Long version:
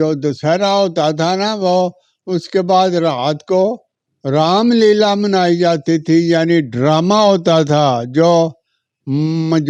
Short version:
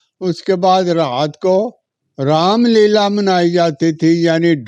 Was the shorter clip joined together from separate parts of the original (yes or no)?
no